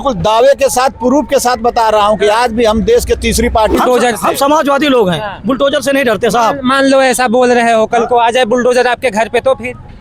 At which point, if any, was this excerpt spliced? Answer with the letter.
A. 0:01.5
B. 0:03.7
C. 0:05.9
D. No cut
B